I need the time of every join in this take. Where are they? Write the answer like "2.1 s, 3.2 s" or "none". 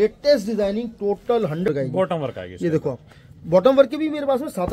1.7 s